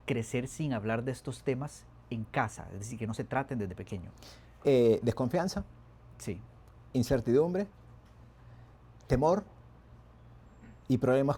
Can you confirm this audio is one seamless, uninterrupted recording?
yes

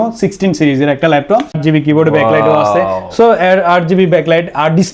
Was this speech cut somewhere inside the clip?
yes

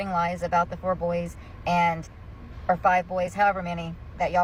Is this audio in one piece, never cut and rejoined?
yes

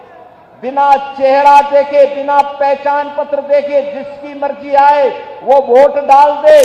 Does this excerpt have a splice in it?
no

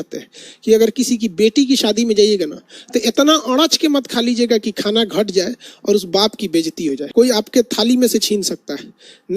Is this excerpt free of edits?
no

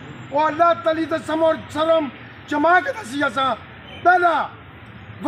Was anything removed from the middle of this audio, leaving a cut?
no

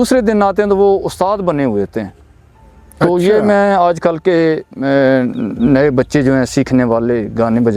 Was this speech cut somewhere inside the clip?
no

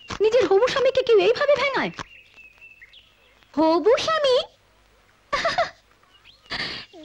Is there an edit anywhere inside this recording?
no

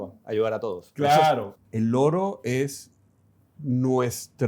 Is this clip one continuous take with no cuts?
no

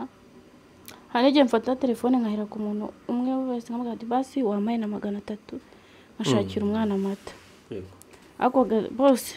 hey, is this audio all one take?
yes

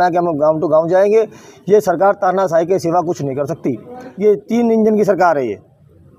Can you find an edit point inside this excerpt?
yes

